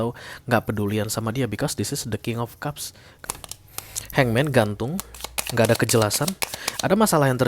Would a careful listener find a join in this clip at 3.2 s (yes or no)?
yes